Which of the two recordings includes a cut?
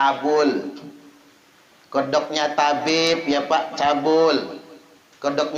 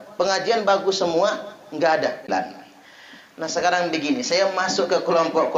second; 1 cut; at 2.2 s

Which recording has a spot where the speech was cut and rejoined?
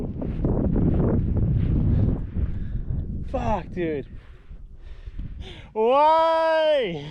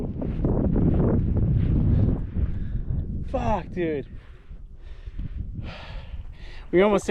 first; 1 cut; at 5.4 s

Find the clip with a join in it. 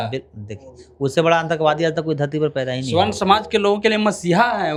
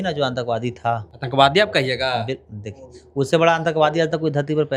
second; 1 cut; at 1.1 s

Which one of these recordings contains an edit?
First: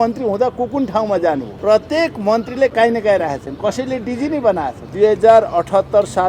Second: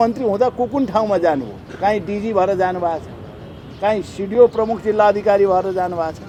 first; 2 cuts; at 1.5 s, 4.8 s

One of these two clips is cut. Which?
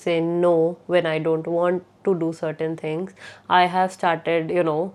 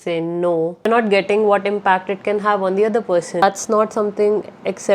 second; 2 cuts; at 0.9 s, 3.4 s

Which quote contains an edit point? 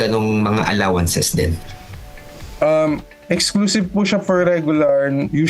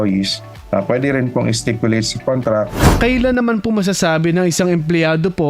second; 1 cut; at 2.8 s

